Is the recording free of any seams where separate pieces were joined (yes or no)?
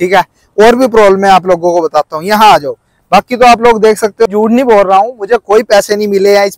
no